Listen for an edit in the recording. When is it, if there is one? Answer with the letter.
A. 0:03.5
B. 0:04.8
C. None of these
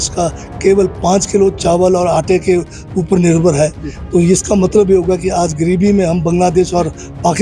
C